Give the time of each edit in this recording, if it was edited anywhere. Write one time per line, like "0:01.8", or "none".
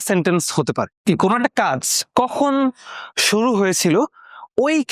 0:01.1

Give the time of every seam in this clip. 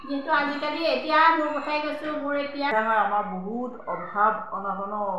0:02.7

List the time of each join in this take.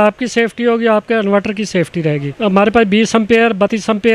0:02.4

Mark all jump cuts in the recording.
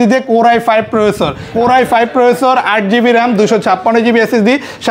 0:01.4

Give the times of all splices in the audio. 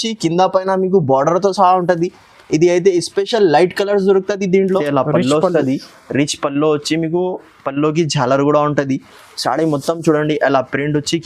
0:04.9

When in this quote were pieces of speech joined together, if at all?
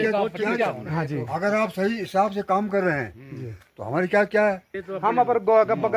0:04.8

